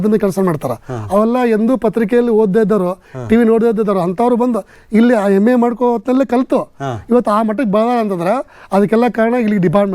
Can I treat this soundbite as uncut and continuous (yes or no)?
yes